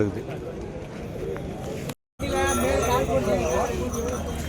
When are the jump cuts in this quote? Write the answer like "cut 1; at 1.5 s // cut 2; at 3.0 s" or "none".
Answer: cut 1; at 1.9 s